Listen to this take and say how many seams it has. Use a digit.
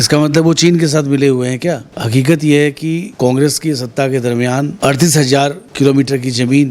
4